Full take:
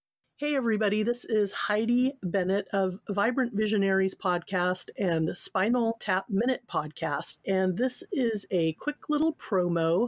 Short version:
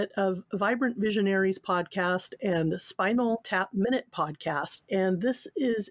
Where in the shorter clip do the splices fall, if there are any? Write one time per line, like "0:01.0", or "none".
none